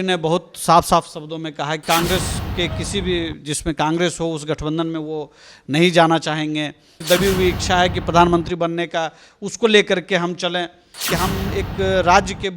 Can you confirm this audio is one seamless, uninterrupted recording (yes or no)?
no